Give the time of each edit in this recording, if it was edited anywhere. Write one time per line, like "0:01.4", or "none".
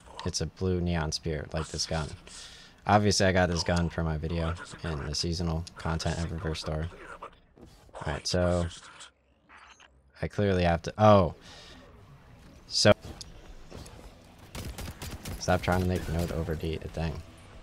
0:12.9